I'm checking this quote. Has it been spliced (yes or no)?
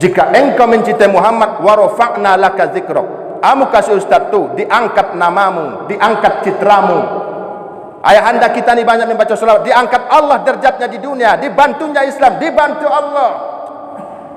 no